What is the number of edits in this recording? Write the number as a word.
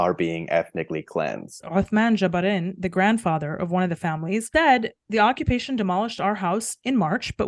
two